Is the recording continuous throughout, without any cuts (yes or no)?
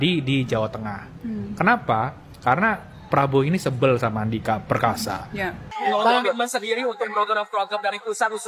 no